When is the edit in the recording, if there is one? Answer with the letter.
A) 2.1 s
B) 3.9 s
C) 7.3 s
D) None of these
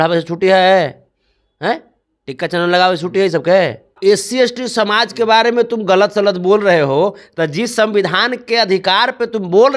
B